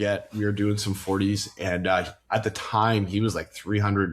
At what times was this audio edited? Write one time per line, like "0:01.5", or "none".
none

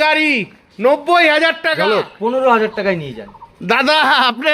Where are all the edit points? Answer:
0:01.8

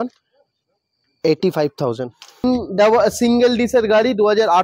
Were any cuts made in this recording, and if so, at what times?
0:02.4

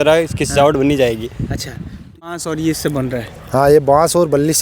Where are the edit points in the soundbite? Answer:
0:02.3

